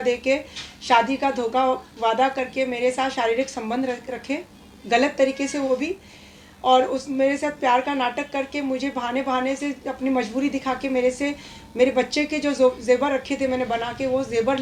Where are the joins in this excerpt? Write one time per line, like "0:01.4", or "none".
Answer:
none